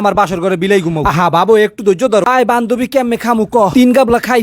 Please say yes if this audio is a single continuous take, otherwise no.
no